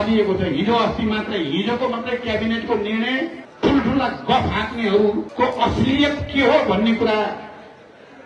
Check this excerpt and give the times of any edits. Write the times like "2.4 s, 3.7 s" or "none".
3.4 s, 5.3 s